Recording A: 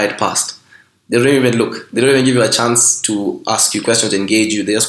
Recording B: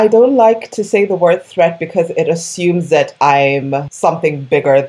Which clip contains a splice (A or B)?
B